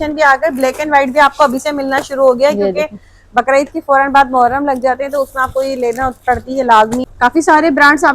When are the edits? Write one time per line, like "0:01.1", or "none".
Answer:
0:07.1